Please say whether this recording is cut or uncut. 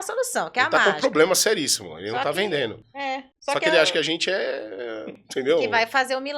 cut